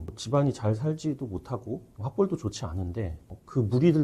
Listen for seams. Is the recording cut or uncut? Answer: cut